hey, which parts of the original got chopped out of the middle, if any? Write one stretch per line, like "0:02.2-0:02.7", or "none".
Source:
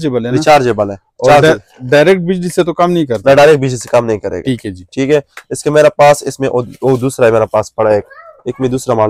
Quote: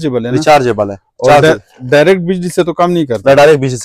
none